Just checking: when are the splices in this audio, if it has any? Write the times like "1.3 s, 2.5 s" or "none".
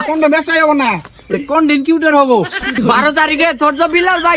2.8 s

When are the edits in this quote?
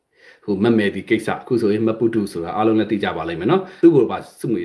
3.7 s

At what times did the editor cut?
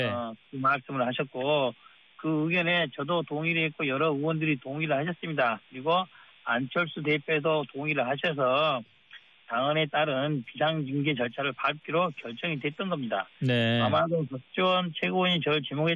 5.2 s

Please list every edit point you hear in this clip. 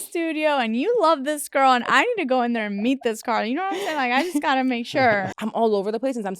5.3 s

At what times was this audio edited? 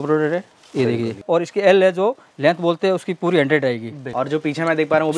1.2 s, 4.0 s

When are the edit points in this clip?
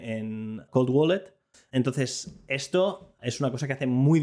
1.5 s

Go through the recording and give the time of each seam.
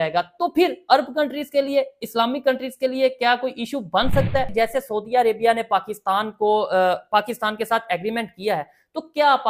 4.5 s

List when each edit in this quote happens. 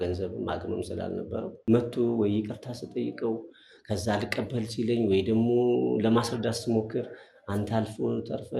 1.5 s

